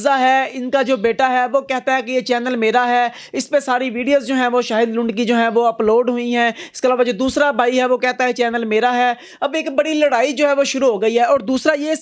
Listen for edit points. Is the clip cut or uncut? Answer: uncut